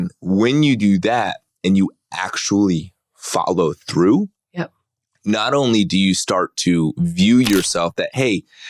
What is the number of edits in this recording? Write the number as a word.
zero